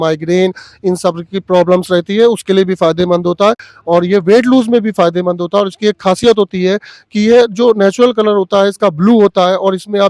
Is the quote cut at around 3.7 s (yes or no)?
no